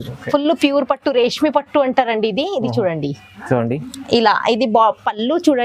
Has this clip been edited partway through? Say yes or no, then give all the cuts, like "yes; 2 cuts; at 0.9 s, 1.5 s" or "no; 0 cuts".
no; 0 cuts